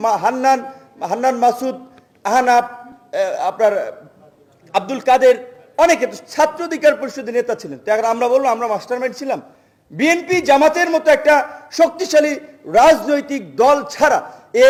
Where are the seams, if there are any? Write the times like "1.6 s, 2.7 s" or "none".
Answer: none